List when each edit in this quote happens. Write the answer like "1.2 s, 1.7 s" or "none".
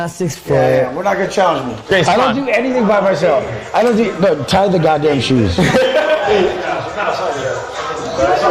1.8 s